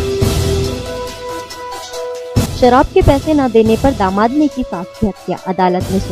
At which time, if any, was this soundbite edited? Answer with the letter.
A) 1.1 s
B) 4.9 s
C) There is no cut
C